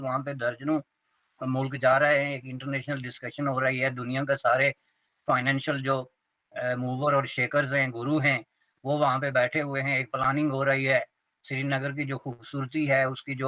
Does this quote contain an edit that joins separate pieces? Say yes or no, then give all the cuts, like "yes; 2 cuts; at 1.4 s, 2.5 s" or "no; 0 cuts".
no; 0 cuts